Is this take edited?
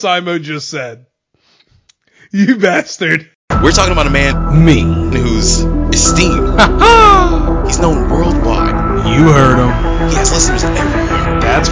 yes; 1 cut; at 3.3 s

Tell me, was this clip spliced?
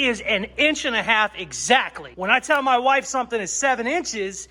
yes; 1 cut; at 2.1 s

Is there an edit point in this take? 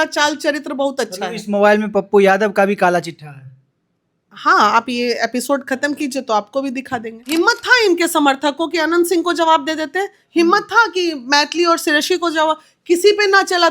yes; 1 cut; at 7.3 s

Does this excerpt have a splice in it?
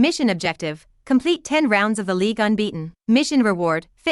yes; 1 cut; at 2.9 s

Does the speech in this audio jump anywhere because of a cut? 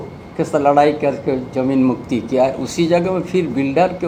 no; 0 cuts

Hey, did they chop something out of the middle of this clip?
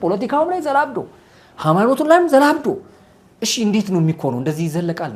no; 0 cuts

